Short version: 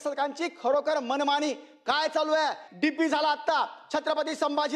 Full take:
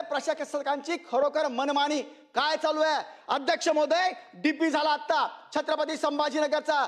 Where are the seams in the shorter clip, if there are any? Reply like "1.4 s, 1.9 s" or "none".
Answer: 2.6 s